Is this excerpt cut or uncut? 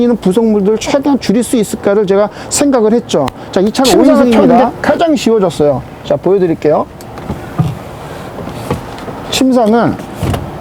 cut